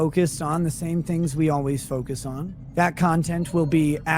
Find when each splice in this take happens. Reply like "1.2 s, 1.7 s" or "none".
2.5 s